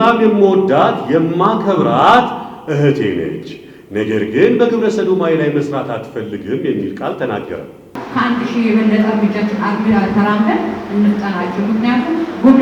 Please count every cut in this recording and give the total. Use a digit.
1